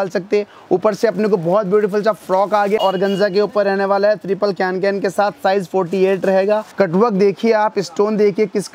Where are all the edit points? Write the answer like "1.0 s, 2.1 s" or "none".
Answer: 2.8 s, 6.7 s